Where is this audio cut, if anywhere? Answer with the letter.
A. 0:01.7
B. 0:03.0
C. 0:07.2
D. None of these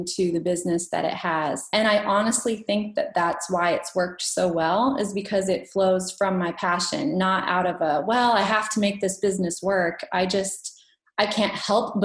A